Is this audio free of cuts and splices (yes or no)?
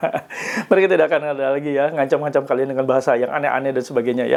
yes